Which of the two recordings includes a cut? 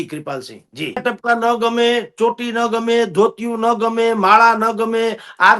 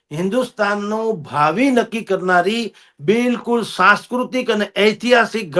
first; 1 cut; at 0.9 s

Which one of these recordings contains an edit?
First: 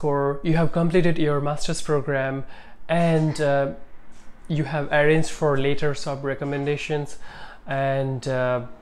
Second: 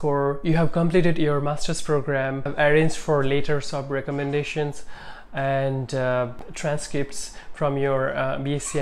second; 2 cuts; at 2.5 s, 6.4 s

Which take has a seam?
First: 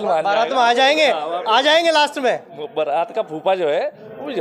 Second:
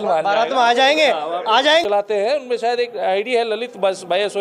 second; 1 cut; at 1.8 s

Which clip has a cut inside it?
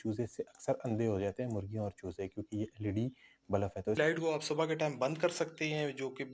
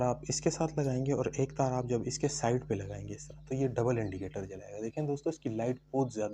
first; 1 cut; at 4.2 s

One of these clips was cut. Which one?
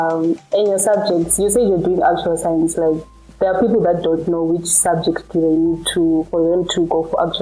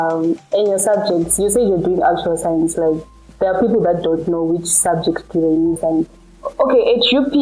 second; 1 cut; at 5.8 s

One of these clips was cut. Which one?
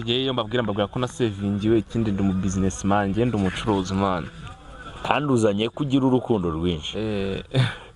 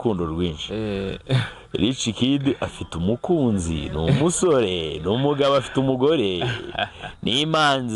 first; 1 cut; at 4.9 s

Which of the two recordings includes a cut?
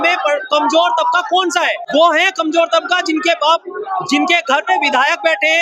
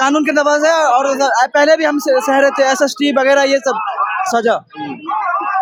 first; 1 cut; at 1.8 s

